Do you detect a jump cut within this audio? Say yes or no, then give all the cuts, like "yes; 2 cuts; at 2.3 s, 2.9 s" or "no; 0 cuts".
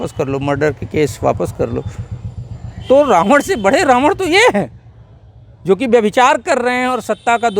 no; 0 cuts